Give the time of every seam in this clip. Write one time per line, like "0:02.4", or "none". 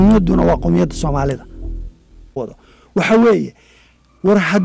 0:02.4